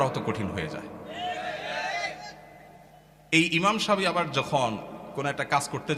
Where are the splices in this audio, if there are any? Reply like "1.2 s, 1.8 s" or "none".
none